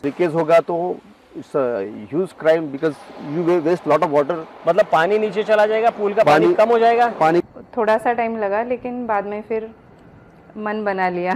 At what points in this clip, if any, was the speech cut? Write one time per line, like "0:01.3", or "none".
0:07.5